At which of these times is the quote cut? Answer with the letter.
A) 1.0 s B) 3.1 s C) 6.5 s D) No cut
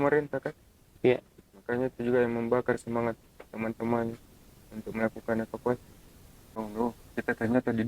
C